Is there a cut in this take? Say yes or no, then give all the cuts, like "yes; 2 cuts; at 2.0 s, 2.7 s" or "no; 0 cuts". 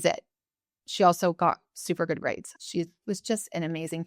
yes; 1 cut; at 2.5 s